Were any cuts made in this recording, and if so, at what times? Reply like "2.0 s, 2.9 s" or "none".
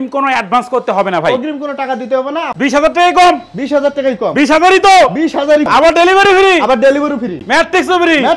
2.5 s, 5.7 s, 7.4 s